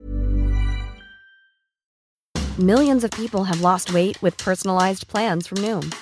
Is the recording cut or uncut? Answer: cut